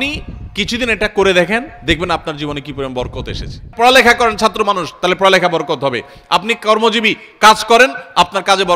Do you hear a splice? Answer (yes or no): yes